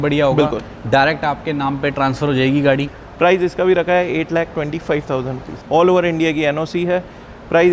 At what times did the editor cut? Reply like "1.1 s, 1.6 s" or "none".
2.9 s, 5.5 s